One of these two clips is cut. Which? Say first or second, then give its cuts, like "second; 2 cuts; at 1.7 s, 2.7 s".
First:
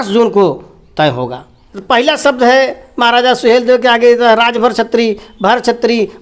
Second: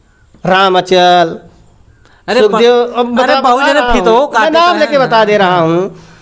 first; 1 cut; at 1.7 s